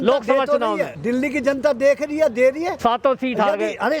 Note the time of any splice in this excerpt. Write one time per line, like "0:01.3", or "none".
0:00.9
0:02.7